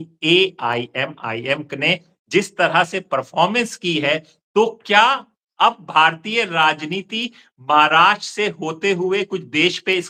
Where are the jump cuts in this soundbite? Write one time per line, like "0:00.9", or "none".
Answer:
none

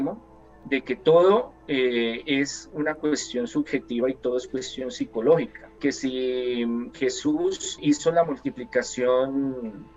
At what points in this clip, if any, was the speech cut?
0:05.6
0:07.8

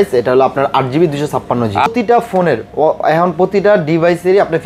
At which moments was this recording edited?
0:01.9

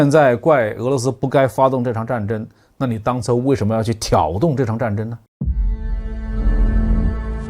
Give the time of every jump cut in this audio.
0:05.2

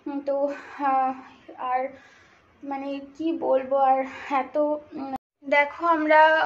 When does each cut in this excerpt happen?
0:05.4

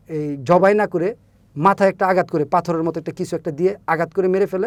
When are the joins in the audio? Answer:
none

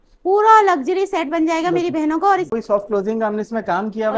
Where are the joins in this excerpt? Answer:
0:02.5

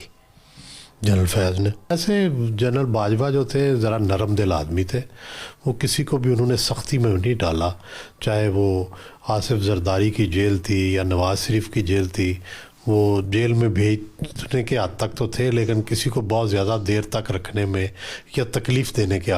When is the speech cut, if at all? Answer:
0:01.9

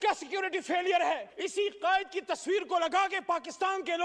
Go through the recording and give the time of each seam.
0:01.2

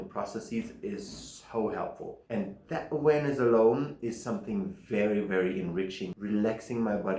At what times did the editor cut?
0:02.1
0:06.1

